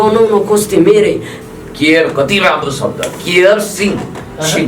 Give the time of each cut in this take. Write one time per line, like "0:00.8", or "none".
0:01.3